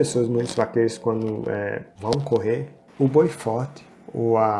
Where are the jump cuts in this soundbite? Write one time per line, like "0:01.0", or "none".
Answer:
0:01.9
0:02.8